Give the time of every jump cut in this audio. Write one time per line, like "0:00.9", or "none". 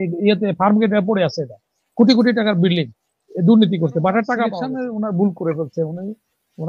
0:04.7